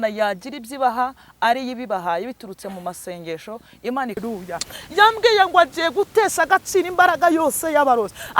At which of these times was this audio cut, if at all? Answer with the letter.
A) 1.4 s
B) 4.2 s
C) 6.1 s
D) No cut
B